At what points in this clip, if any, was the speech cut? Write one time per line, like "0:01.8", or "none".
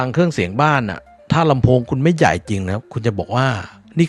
none